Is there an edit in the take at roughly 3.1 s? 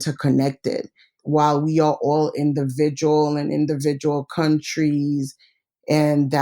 no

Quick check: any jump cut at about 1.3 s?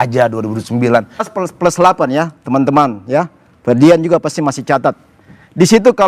yes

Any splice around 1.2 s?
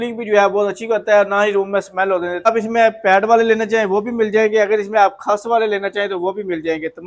no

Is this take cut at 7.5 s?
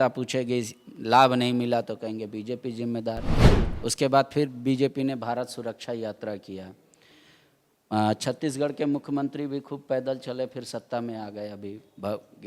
no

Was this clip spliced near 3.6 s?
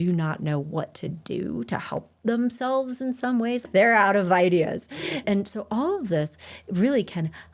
yes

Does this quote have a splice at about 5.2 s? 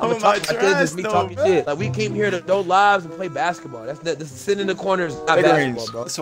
no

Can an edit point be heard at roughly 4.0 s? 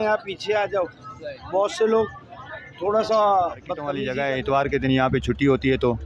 yes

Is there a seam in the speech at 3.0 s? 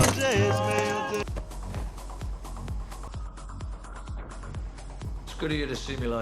no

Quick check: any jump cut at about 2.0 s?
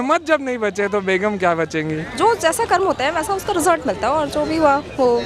yes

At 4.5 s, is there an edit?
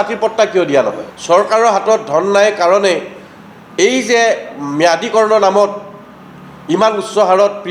no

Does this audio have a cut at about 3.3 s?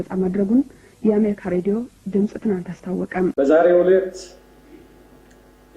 yes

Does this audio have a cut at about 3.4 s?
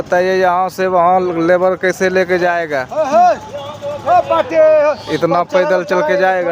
no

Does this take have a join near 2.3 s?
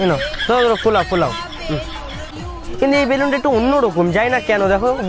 yes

